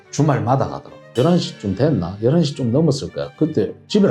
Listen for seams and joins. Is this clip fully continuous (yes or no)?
no